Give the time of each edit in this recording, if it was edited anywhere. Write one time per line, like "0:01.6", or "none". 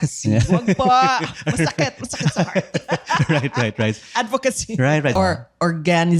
0:05.1